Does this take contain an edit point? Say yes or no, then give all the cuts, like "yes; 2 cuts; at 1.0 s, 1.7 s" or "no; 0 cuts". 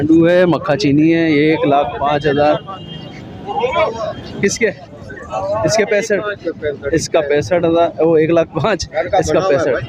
no; 0 cuts